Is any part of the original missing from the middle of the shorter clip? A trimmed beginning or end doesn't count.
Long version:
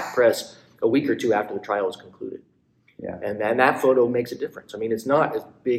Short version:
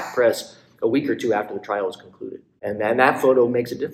yes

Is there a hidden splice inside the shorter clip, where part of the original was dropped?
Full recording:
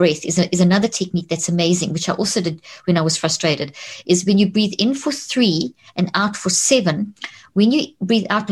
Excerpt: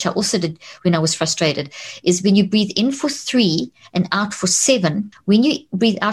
yes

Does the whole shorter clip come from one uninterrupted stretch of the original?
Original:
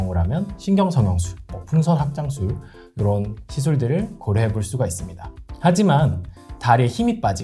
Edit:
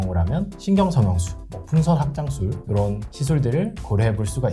no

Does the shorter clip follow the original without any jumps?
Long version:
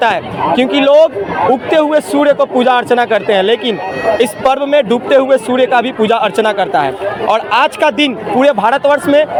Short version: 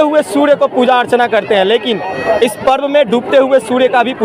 yes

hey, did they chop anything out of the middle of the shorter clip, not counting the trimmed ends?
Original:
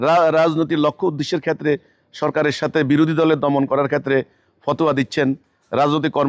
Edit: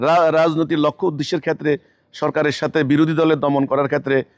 no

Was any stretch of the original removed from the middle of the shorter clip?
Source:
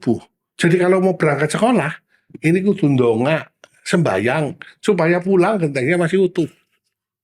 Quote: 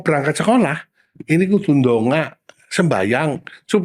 no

